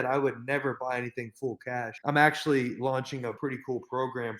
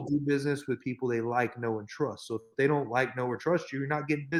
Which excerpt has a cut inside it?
first; 2 cuts; at 1.9 s, 3.4 s

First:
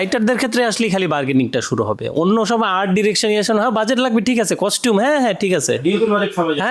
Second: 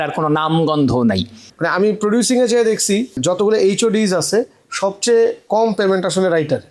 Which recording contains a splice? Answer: second; 2 cuts; at 1.4 s, 3.2 s

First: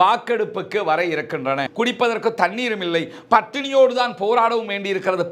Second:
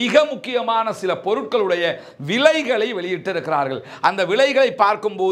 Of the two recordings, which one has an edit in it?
first; 1 cut; at 1.7 s

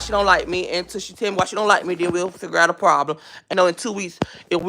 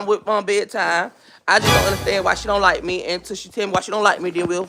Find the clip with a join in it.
first; 1 cut; at 3.5 s

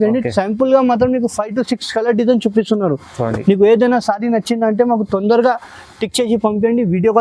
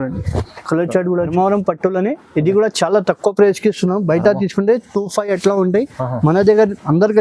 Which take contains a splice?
second; 1 cut; at 1.3 s

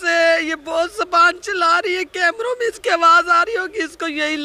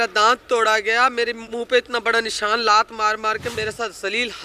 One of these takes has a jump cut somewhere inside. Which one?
second; 2 cuts; at 1.4 s, 3.5 s

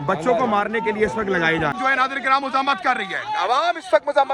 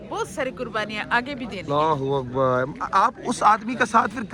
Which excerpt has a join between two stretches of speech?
first; 1 cut; at 1.8 s

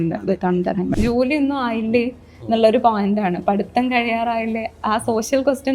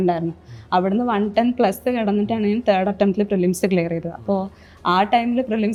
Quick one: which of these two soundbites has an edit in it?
first; 1 cut; at 0.9 s

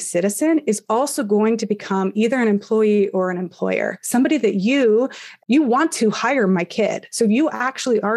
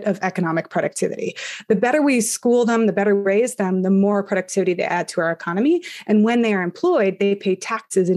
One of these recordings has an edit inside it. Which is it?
first; 1 cut; at 5.3 s

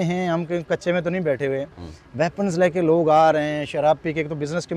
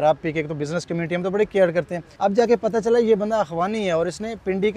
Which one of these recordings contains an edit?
second; 1 cut; at 2.0 s

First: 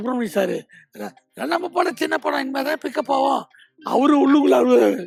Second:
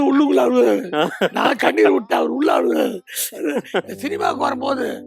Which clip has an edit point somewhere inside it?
second; 1 cut; at 3.9 s

